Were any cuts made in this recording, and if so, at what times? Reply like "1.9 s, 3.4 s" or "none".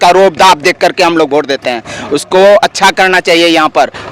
none